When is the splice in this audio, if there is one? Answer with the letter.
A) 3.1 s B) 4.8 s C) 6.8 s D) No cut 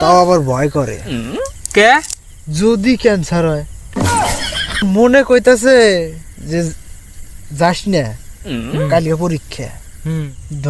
B